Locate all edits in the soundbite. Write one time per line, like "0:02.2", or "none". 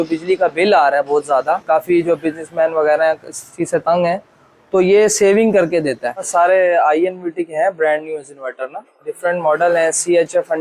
0:01.6
0:06.3
0:09.1